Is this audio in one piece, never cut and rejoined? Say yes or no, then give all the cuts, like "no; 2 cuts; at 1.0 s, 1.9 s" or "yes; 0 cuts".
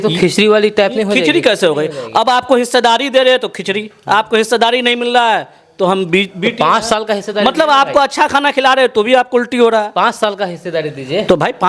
yes; 0 cuts